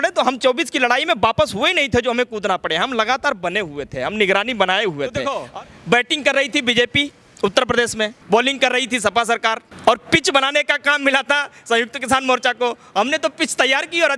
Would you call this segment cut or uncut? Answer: cut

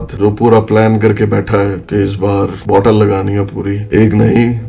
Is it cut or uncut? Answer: uncut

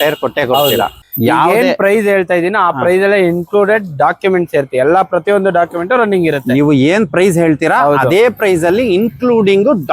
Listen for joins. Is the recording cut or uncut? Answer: cut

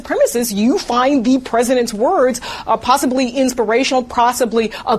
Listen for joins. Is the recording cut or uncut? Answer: uncut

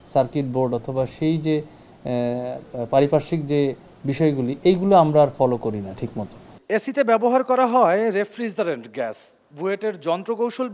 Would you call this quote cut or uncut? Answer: uncut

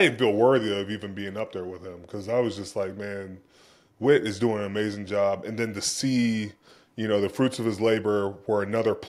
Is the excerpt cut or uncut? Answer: uncut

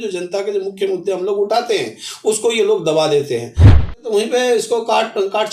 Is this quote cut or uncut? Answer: cut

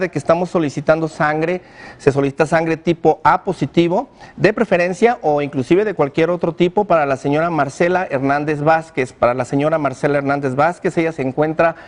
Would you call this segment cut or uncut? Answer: cut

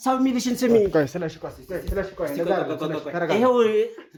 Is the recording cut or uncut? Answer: uncut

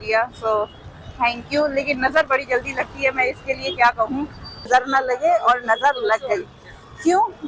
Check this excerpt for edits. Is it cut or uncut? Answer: cut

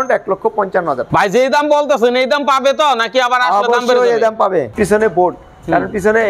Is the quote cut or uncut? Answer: cut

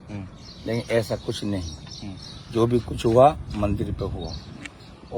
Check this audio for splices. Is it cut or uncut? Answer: uncut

